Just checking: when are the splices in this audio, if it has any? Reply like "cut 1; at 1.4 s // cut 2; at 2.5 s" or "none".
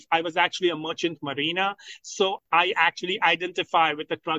cut 1; at 2.4 s